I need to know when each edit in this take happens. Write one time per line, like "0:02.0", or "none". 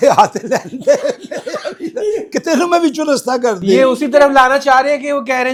none